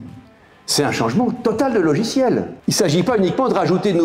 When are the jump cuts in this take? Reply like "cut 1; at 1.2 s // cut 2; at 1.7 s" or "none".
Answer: cut 1; at 2.5 s